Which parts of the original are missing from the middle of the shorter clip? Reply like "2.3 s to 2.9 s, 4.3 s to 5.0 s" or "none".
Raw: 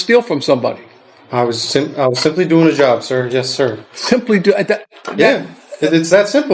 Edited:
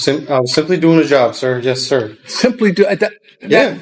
none